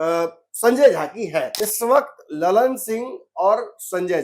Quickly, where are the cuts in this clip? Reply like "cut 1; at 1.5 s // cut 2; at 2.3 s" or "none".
cut 1; at 1.6 s